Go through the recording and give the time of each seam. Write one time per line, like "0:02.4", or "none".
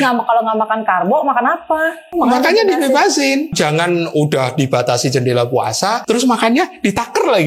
0:02.0
0:03.5
0:06.0